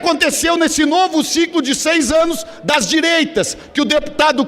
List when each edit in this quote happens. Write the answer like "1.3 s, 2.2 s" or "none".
none